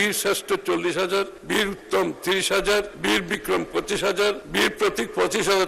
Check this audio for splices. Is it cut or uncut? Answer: cut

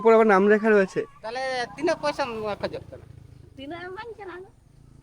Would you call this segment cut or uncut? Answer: cut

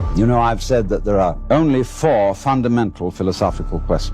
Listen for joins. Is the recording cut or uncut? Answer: cut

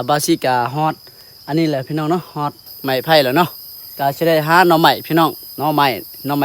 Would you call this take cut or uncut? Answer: cut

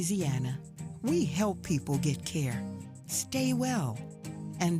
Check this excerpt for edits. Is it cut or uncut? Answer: uncut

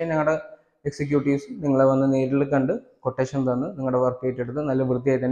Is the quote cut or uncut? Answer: uncut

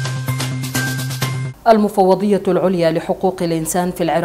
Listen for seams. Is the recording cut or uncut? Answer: cut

